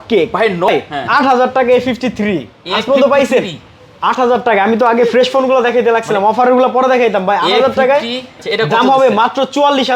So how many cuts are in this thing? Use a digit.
2